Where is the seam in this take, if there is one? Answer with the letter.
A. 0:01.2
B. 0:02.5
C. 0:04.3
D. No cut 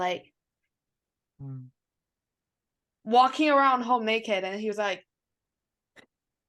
D